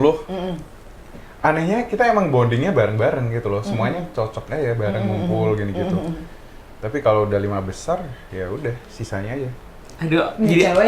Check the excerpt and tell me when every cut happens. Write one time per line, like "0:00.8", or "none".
0:09.8

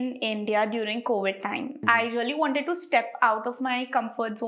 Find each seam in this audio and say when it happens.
0:01.8

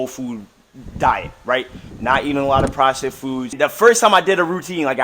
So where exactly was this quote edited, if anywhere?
0:03.5

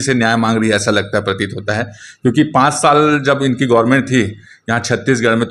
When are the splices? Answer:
none

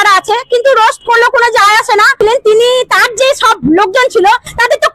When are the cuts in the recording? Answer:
0:02.2

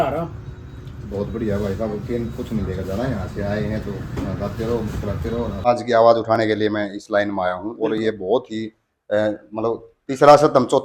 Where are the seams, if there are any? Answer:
0:05.7

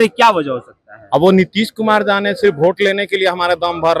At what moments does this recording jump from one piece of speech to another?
none

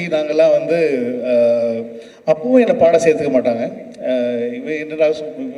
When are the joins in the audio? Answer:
none

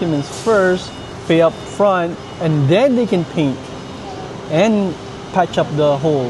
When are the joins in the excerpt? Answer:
none

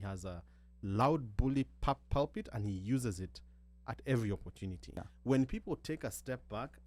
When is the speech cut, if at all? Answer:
0:05.1

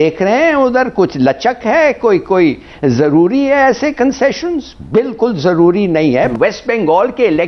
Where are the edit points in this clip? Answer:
none

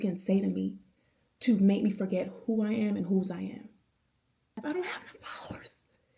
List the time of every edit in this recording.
0:04.6

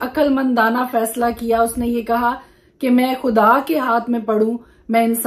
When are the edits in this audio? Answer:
none

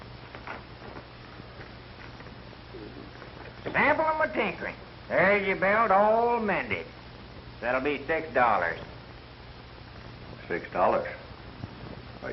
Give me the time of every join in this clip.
0:08.7

